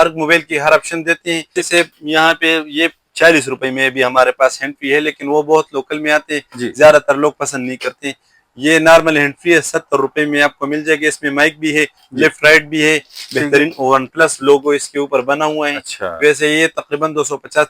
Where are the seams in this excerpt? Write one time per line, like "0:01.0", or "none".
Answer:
0:01.2